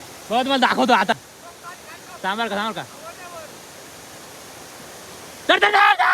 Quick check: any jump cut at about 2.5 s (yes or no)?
no